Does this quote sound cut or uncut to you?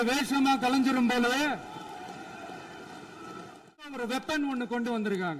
cut